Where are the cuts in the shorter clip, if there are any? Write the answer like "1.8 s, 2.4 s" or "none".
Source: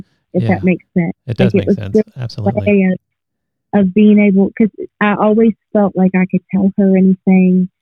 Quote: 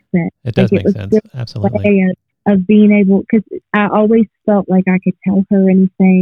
2.3 s